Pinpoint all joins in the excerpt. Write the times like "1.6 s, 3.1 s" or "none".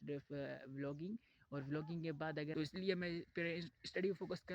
2.5 s